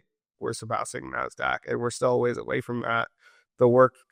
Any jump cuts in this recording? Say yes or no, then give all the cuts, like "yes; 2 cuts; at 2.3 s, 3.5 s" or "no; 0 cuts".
no; 0 cuts